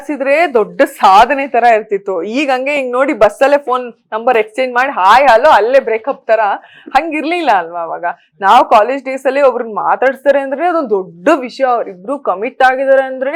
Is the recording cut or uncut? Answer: uncut